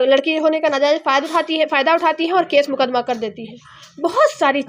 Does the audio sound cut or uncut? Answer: uncut